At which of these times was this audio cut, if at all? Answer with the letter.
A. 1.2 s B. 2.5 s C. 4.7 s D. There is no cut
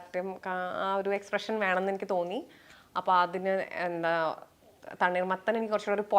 D